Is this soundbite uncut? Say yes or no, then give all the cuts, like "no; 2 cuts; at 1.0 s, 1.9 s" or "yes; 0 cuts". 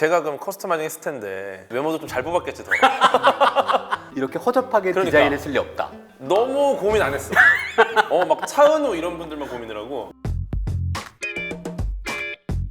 no; 2 cuts; at 4.1 s, 10.1 s